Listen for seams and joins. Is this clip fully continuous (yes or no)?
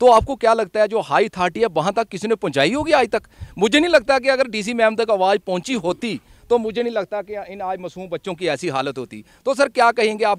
yes